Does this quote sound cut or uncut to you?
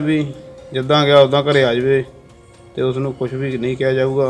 uncut